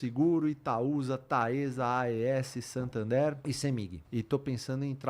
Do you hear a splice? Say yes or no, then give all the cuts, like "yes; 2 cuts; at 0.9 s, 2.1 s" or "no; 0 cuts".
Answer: yes; 1 cut; at 3.9 s